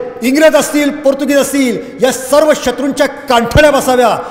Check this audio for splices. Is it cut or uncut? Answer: uncut